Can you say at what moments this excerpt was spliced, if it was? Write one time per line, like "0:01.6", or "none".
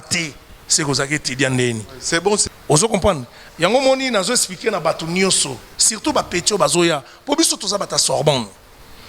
0:02.5